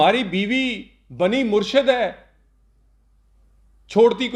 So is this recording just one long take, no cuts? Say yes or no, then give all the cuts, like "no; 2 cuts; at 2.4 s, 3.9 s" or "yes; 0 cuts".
yes; 0 cuts